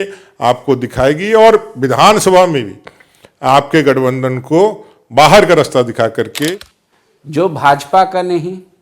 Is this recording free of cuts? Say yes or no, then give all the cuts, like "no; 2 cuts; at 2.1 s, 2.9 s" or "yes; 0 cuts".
no; 1 cut; at 6.5 s